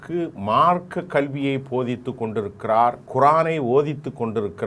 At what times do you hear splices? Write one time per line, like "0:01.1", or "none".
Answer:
0:03.0